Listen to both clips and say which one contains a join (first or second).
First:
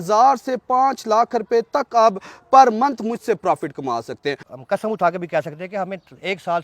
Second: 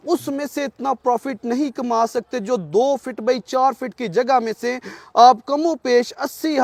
first